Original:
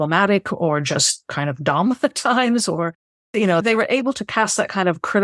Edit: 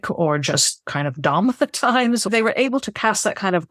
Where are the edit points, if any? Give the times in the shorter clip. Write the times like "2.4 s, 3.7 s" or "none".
2.3 s